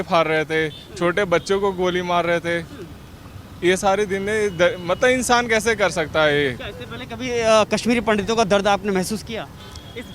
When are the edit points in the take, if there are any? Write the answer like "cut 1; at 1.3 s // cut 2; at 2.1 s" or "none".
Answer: none

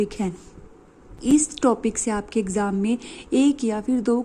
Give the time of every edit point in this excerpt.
cut 1; at 1.3 s

